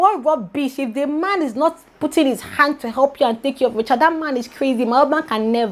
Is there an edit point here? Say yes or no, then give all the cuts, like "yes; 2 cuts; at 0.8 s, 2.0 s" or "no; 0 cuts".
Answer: no; 0 cuts